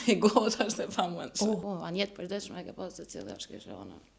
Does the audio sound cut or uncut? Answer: cut